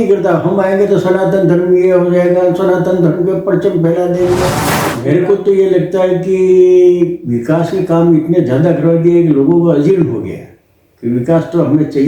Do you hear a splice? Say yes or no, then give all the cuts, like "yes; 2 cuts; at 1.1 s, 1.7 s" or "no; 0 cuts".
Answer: yes; 1 cut; at 5.0 s